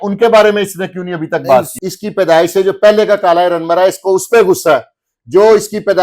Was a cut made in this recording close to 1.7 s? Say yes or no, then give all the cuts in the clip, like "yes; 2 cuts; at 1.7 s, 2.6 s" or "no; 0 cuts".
yes; 1 cut; at 1.7 s